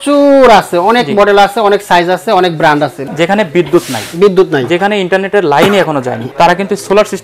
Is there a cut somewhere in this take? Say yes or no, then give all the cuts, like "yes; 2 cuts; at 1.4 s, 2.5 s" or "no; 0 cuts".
yes; 2 cuts; at 3.0 s, 6.2 s